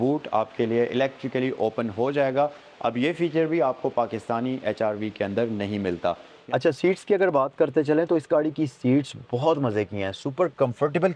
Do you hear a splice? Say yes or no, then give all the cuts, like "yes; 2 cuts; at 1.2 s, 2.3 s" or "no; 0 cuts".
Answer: yes; 1 cut; at 6.3 s